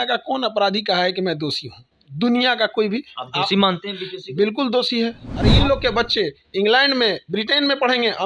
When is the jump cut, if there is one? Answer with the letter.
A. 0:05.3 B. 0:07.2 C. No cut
A